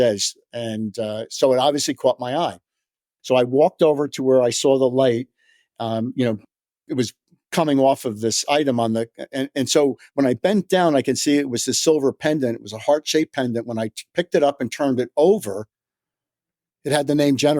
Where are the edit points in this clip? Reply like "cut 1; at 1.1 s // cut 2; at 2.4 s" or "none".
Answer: cut 1; at 6.4 s